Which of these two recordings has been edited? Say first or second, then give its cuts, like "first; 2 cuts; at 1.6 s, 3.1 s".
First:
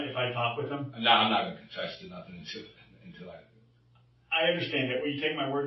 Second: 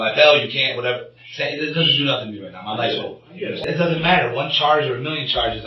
second; 1 cut; at 3.6 s